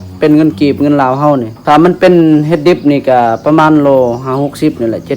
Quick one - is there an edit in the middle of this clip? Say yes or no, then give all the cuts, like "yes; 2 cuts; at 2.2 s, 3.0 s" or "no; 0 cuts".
yes; 1 cut; at 1.5 s